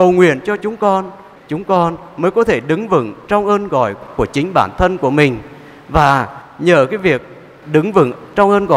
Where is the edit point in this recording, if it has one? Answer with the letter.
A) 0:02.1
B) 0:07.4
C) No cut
C